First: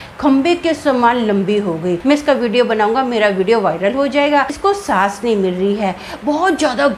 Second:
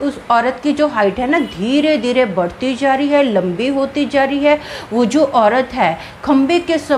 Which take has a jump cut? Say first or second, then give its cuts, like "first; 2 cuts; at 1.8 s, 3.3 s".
first; 2 cuts; at 2.0 s, 4.5 s